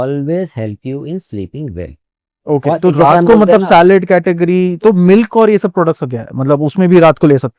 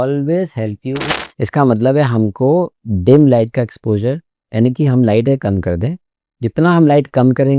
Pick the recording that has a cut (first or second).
second